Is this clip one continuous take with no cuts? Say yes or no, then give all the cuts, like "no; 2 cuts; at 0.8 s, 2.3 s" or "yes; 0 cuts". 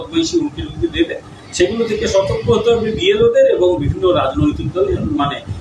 yes; 0 cuts